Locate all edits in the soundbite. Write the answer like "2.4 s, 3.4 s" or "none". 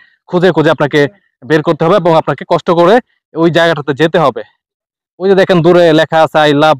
none